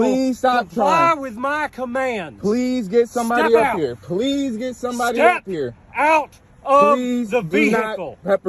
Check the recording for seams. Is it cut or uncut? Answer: uncut